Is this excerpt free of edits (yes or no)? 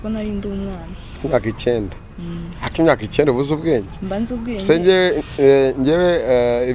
yes